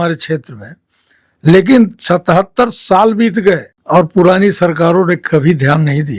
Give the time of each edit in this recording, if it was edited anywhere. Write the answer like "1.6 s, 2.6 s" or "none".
3.7 s